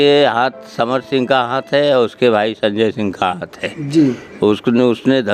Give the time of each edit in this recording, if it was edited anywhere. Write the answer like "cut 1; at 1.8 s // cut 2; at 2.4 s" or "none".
none